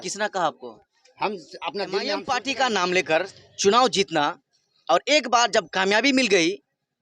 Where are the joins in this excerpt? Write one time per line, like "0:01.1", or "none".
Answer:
0:02.2